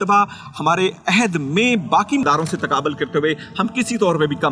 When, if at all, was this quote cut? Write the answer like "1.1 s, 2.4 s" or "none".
none